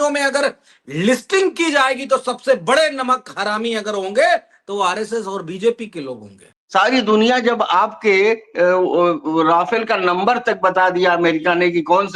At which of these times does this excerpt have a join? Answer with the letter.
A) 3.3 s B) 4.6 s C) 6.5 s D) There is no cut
C